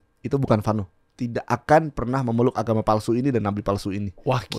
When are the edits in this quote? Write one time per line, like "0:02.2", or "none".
none